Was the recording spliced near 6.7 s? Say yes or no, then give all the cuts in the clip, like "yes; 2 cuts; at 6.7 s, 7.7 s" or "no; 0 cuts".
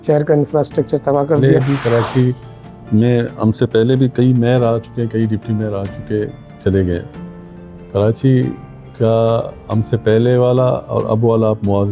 no; 1 cut; at 1.4 s